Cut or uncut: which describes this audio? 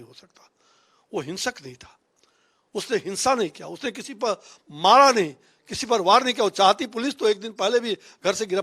uncut